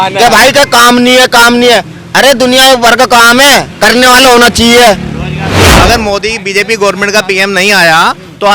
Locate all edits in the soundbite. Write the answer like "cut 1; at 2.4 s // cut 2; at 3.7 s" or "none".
cut 1; at 5.7 s